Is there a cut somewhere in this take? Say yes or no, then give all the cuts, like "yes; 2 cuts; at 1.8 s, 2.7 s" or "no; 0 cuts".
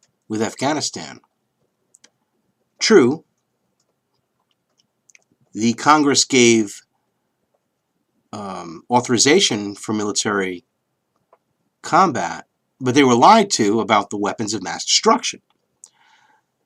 no; 0 cuts